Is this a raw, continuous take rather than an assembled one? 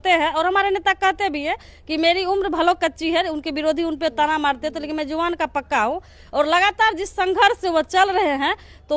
yes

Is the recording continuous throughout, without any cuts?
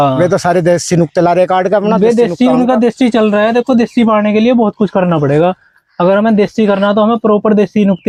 yes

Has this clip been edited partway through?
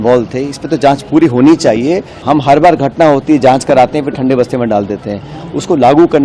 yes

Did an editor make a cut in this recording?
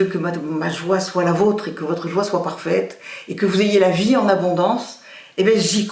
no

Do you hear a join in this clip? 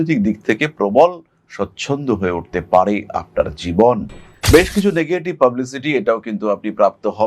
yes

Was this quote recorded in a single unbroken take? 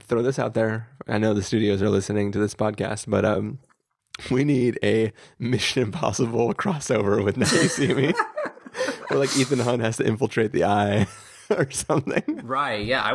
no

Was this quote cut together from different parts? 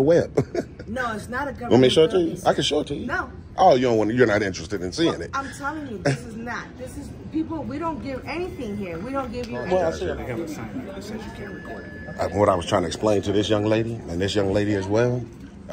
yes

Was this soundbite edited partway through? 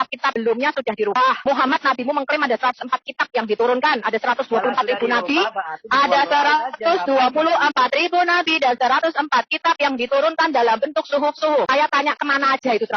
yes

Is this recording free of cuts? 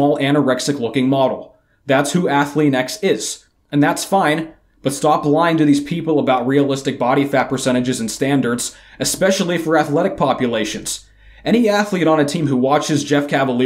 yes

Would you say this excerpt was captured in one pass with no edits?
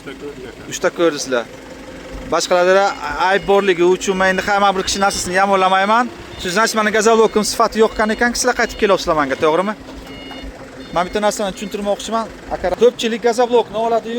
no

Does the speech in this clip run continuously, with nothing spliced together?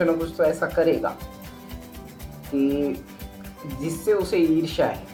yes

